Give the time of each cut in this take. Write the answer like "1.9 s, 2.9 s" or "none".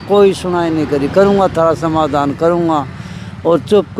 none